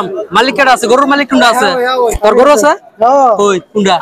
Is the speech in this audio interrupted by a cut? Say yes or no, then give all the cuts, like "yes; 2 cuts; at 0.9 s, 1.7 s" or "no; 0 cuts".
no; 0 cuts